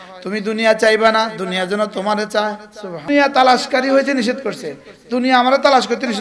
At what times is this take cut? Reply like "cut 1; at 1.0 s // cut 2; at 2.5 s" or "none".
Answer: cut 1; at 3.1 s